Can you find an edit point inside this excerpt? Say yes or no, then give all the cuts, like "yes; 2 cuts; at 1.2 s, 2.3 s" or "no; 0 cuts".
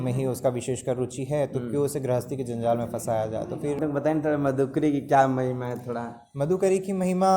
yes; 1 cut; at 3.8 s